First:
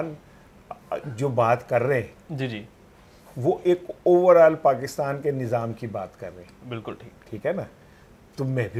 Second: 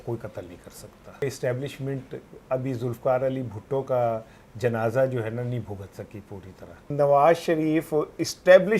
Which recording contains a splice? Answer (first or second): second